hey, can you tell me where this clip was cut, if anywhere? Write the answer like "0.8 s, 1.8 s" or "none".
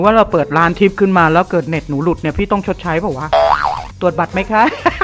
3.9 s